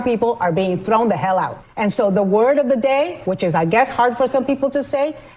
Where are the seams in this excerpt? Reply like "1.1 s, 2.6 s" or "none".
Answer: 1.6 s